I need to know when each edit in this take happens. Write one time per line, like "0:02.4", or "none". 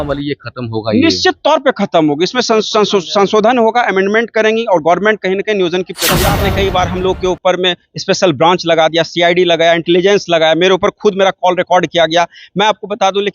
0:06.0